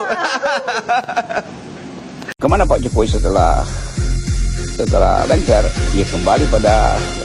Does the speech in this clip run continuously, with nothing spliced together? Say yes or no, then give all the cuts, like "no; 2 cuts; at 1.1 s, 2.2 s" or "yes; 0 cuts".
yes; 0 cuts